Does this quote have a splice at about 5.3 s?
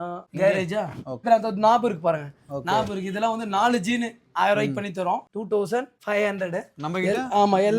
yes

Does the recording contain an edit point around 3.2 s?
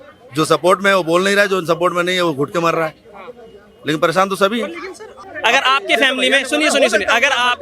no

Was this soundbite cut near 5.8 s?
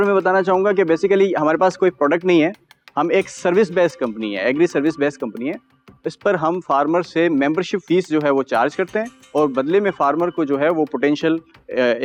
no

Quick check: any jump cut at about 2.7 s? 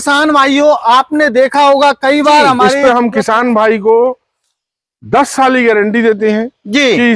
yes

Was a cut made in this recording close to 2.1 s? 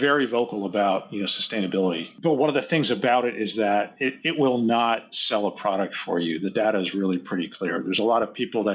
yes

